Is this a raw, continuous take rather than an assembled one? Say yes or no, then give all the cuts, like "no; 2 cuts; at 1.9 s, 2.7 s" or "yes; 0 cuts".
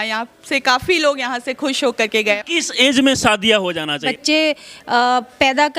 no; 2 cuts; at 2.4 s, 4.1 s